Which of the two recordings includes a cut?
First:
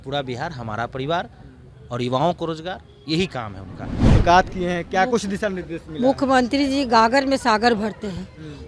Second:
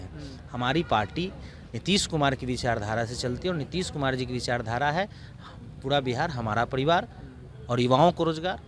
first; 1 cut; at 4.2 s

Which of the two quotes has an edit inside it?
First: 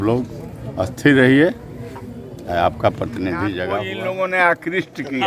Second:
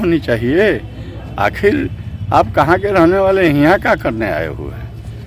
first; 1 cut; at 3.6 s

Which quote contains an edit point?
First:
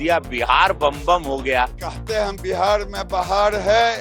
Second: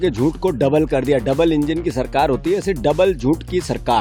first; 1 cut; at 1.7 s

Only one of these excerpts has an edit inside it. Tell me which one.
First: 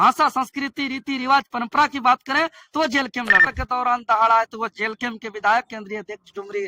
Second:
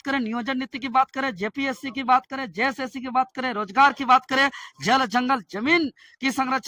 first; 1 cut; at 3.5 s

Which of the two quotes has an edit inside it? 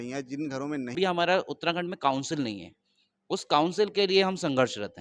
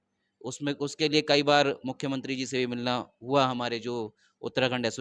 first; 1 cut; at 0.9 s

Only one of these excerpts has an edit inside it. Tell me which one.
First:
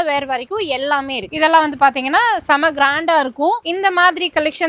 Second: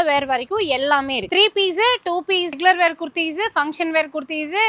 second; 2 cuts; at 1.3 s, 2.6 s

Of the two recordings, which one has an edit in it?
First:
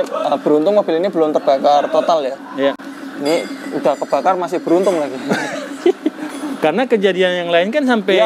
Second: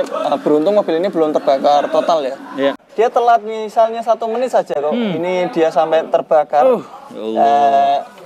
second; 1 cut; at 2.8 s

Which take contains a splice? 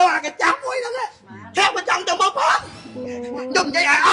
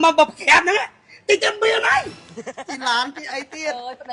second; 1 cut; at 2.6 s

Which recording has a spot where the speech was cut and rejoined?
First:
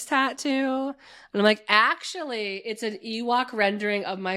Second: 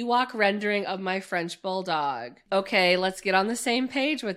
second; 1 cut; at 2.3 s

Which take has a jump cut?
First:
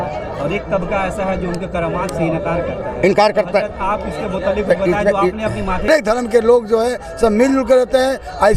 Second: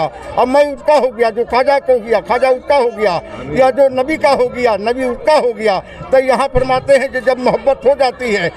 first; 1 cut; at 5.9 s

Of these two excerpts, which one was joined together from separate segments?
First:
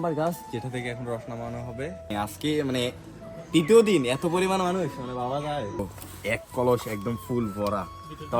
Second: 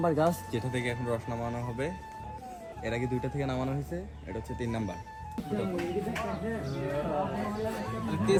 first; 2 cuts; at 2.1 s, 5.8 s

